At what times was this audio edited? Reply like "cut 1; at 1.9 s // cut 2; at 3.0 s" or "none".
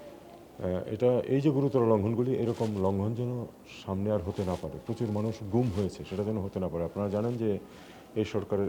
none